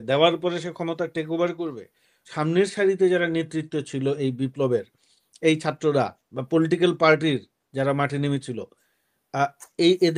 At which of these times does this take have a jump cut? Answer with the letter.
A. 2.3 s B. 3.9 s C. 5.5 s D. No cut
A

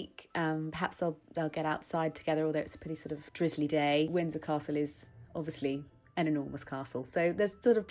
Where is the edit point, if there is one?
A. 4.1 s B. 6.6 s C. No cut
A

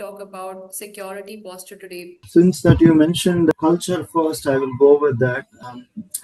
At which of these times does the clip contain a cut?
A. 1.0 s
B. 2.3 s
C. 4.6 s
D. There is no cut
B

